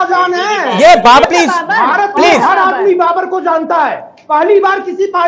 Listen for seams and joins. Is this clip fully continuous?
no; 1 cut; at 1.2 s

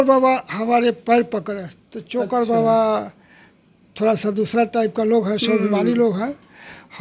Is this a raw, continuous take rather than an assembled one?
yes; 0 cuts

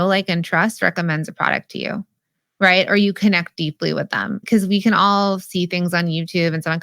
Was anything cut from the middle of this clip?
yes; 1 cut; at 4.4 s

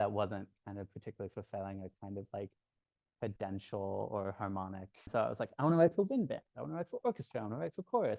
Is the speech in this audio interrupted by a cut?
yes; 1 cut; at 5.1 s

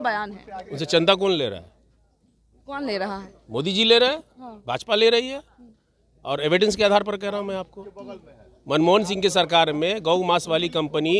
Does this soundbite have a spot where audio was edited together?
no; 0 cuts

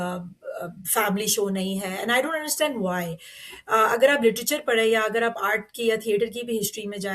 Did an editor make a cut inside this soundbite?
no; 0 cuts

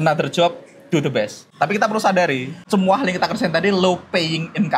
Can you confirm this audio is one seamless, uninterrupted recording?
no; 2 cuts; at 1.4 s, 2.5 s

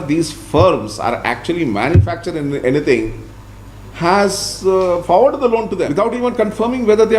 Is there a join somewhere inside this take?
yes; 1 cut; at 5.9 s

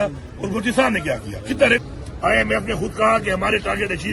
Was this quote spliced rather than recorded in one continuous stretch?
yes; 1 cut; at 1.8 s

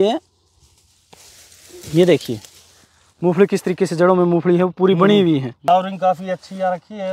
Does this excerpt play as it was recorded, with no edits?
no; 1 cut; at 5.6 s

